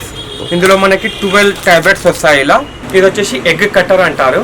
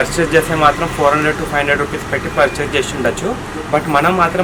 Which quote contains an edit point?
first; 1 cut; at 2.8 s

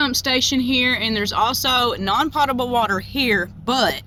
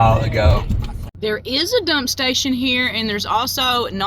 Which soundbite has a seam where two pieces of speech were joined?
second; 1 cut; at 1.0 s

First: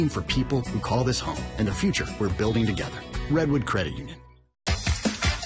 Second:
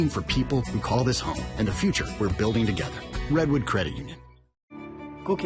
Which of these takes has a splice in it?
first; 1 cut; at 4.4 s

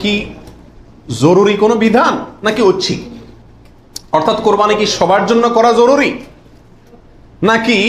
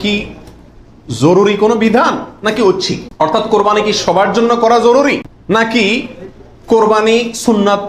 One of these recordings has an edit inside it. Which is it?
second; 2 cuts; at 3.0 s, 5.3 s

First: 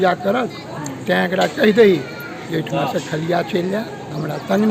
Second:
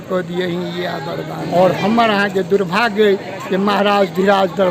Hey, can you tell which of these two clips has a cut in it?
second; 1 cut; at 1.4 s

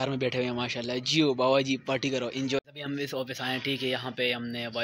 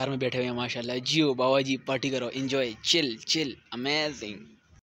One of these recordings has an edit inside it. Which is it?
first; 1 cut; at 2.6 s

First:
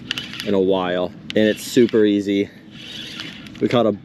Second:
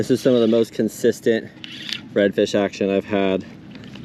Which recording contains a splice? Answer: first; 1 cut; at 1.2 s

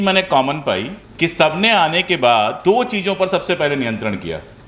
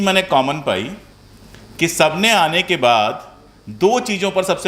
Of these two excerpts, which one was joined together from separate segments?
first; 2 cuts; at 1.0 s, 2.6 s

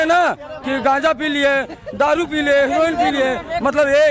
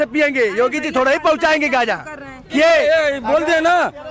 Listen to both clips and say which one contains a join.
second; 1 cut; at 2.5 s

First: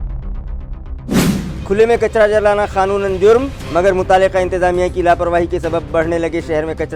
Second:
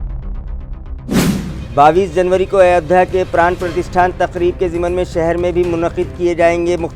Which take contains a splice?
first; 1 cut; at 1.3 s

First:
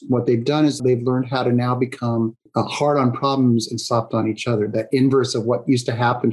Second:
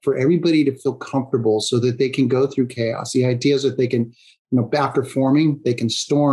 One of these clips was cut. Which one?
first; 2 cuts; at 0.8 s, 2.4 s

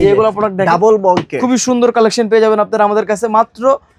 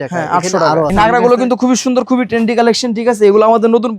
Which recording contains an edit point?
second; 1 cut; at 0.9 s

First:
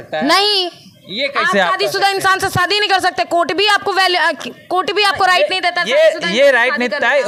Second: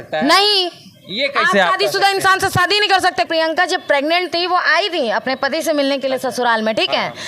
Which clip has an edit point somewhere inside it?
second; 1 cut; at 3.3 s

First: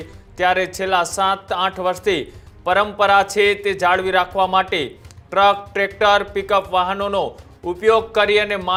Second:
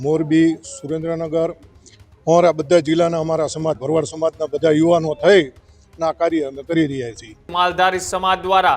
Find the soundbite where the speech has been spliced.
second; 1 cut; at 7.5 s

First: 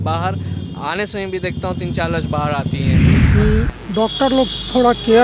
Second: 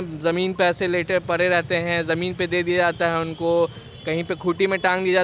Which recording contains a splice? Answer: first; 1 cut; at 3.3 s

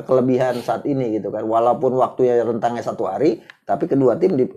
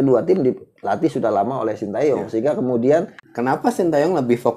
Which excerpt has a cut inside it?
second; 1 cut; at 3.2 s

